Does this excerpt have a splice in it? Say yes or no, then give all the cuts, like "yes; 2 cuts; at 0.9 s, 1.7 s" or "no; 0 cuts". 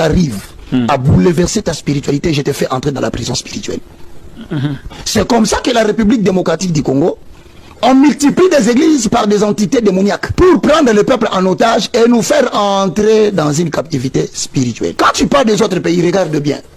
yes; 2 cuts; at 10.3 s, 14.9 s